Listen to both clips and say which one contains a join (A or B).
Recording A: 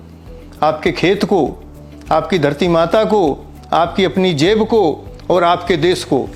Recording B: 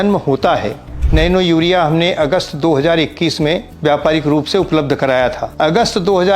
B